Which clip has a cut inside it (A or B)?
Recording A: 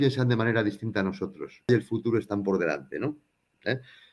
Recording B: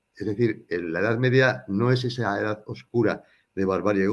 A